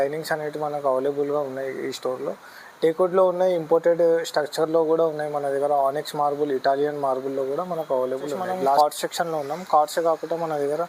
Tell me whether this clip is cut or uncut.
cut